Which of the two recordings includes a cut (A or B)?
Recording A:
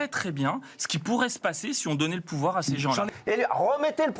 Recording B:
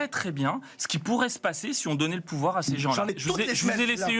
A